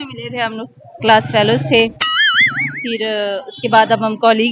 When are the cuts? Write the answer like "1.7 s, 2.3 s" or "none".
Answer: none